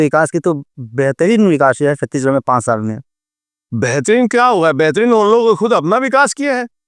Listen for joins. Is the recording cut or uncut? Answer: uncut